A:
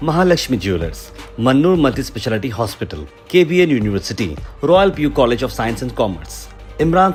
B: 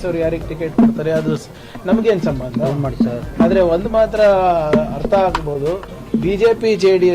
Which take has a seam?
B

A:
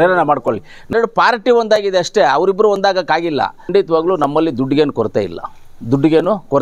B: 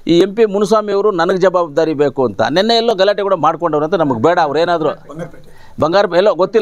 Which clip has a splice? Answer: A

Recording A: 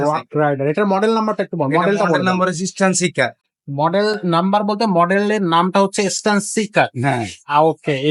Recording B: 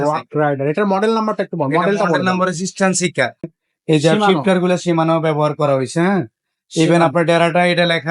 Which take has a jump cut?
B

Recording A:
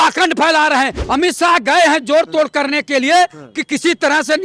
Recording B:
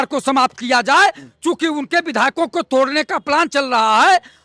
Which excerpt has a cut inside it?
A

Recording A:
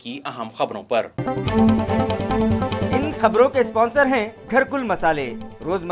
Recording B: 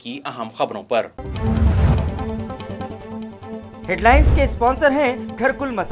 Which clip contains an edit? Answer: B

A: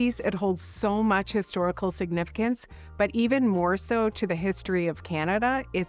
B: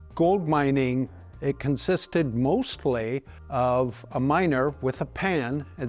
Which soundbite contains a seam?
B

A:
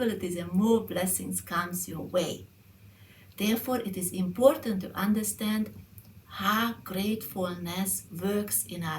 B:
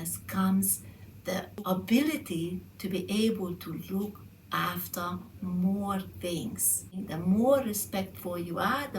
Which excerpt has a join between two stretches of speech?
B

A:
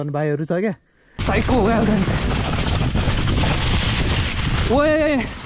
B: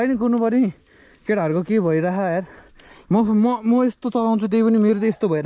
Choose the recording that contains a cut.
A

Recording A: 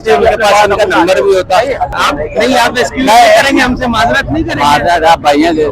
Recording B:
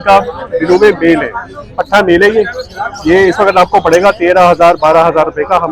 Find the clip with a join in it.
A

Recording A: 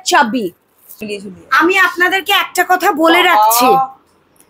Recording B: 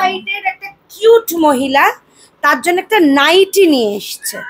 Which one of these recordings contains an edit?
A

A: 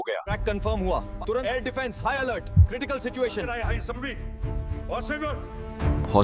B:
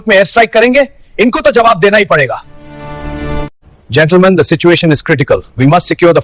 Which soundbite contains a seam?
A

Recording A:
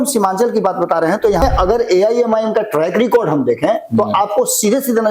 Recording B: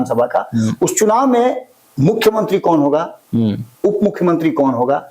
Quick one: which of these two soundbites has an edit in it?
A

